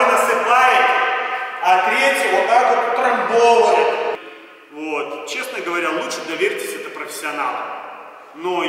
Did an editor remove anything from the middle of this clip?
yes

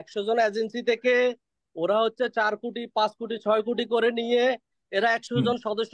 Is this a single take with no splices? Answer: yes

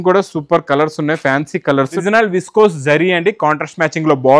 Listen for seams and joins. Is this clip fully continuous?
no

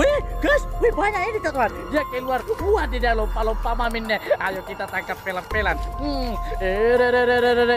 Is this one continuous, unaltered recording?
yes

